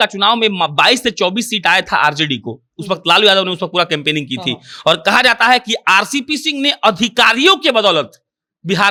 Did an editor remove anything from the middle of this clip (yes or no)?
no